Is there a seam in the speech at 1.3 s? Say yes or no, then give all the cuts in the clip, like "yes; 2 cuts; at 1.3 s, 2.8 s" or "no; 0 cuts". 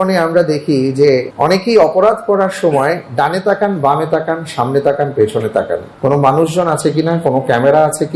yes; 2 cuts; at 1.3 s, 5.9 s